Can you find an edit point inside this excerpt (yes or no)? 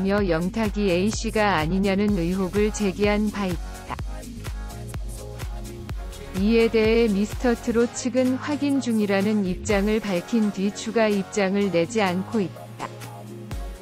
yes